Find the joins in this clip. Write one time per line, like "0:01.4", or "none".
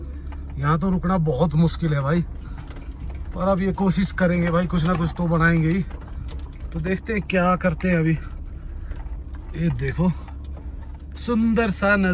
none